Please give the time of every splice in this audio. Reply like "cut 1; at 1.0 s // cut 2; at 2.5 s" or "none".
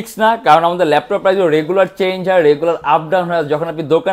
none